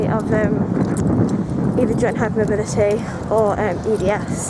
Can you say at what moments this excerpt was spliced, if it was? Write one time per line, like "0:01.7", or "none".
none